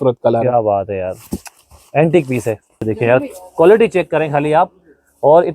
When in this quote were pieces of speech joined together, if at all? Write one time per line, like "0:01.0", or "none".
0:02.8